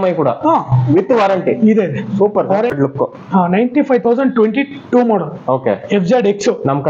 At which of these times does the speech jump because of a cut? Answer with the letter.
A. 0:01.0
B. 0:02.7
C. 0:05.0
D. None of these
B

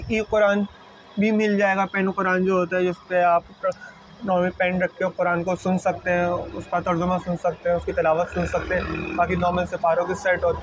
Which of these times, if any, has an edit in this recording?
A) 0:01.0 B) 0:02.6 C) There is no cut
C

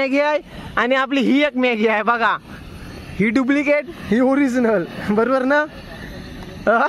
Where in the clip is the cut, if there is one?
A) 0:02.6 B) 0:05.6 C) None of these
C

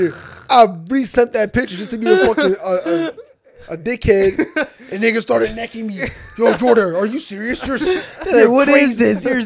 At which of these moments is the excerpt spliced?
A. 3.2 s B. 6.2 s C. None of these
C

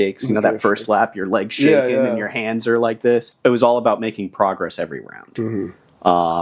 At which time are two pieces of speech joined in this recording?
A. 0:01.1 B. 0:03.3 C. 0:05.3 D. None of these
B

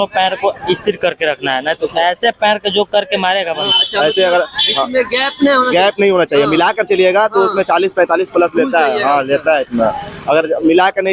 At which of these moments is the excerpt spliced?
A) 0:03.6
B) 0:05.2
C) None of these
A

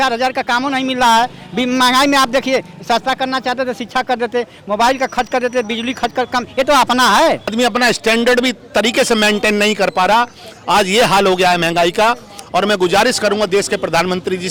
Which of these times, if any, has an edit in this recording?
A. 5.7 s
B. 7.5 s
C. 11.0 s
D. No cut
B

